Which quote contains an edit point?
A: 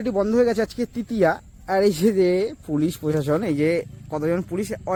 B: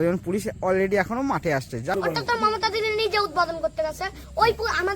B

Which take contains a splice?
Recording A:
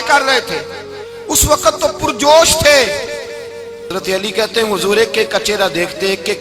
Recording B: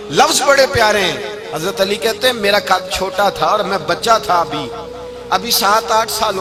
A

